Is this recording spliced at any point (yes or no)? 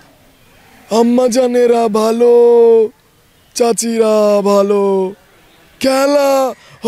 no